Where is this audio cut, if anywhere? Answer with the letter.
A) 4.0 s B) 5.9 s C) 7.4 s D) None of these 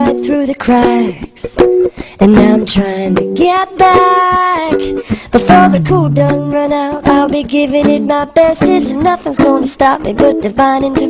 D